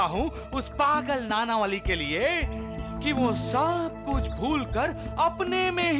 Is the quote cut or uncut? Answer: uncut